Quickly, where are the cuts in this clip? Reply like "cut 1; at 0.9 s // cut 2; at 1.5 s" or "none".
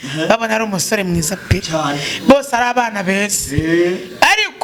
none